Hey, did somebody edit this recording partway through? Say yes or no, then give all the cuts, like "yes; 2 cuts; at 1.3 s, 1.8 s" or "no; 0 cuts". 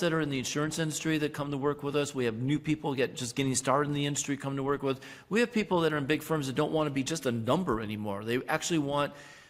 no; 0 cuts